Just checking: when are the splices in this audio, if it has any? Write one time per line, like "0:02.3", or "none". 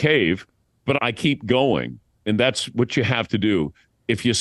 0:01.0